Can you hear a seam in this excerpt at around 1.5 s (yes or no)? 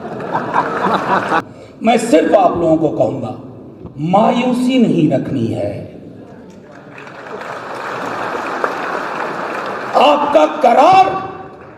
yes